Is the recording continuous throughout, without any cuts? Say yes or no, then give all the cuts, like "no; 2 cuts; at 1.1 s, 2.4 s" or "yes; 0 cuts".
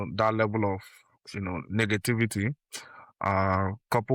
yes; 0 cuts